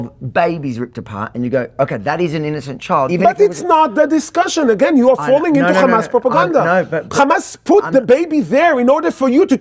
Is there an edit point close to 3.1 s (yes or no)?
yes